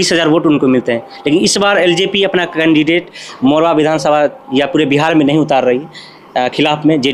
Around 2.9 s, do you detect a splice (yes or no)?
no